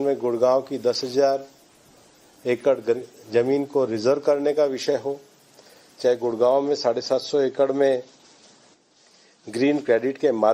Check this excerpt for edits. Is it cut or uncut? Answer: cut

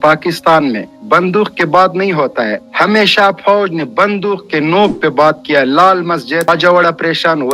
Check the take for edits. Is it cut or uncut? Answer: cut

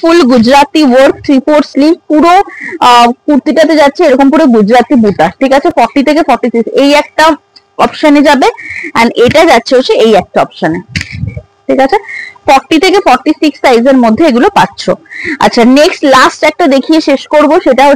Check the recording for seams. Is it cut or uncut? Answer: uncut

